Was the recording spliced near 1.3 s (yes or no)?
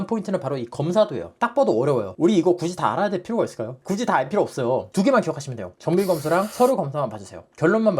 yes